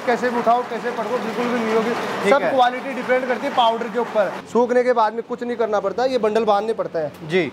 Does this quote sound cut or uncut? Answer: cut